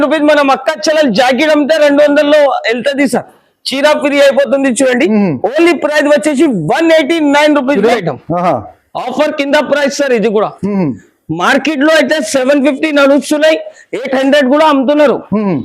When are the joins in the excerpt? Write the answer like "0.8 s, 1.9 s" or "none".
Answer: 7.9 s